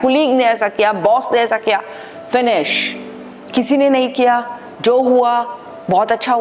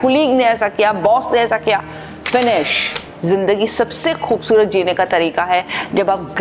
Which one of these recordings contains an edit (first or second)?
second